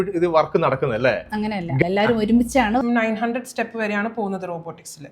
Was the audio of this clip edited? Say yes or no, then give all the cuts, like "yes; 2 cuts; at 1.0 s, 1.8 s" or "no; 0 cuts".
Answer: yes; 1 cut; at 2.8 s